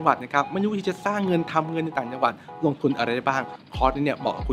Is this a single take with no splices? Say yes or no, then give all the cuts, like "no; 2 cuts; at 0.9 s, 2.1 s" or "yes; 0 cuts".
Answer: yes; 0 cuts